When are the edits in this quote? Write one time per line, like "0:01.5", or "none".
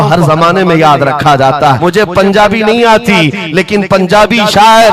0:01.8